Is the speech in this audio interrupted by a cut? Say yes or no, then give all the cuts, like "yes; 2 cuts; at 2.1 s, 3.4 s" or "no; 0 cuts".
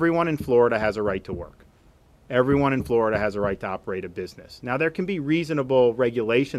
no; 0 cuts